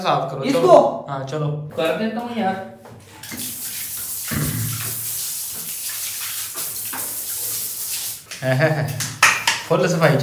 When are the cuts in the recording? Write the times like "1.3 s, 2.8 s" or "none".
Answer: none